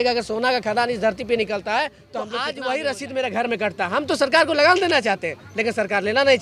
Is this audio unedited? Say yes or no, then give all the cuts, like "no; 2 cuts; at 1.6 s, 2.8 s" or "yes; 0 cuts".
no; 1 cut; at 2.3 s